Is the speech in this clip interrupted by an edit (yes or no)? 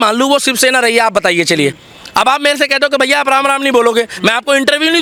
no